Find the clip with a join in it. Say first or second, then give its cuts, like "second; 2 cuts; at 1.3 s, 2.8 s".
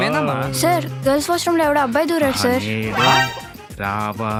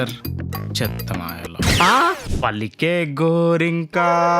second; 1 cut; at 2.2 s